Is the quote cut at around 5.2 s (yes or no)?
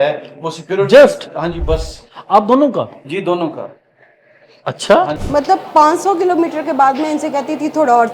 yes